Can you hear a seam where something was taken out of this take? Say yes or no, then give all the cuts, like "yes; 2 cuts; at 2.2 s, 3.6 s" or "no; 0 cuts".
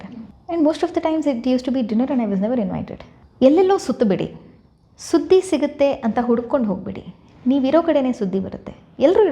yes; 1 cut; at 3.0 s